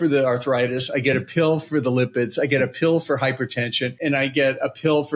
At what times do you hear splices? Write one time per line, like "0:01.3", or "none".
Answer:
none